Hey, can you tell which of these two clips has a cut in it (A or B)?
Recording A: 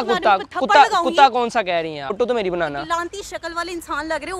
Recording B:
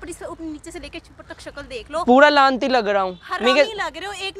A